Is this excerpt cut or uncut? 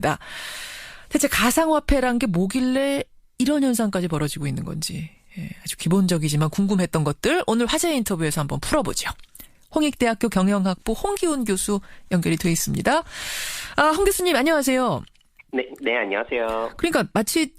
cut